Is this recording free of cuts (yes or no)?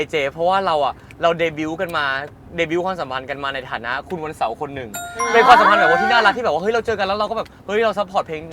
yes